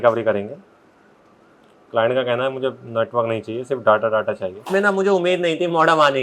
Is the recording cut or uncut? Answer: cut